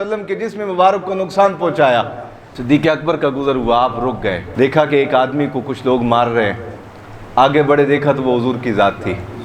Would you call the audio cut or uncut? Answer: uncut